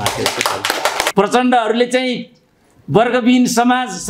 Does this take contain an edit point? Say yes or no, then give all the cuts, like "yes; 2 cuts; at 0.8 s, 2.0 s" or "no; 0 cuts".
yes; 1 cut; at 1.1 s